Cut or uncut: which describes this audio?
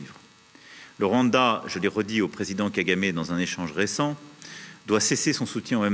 uncut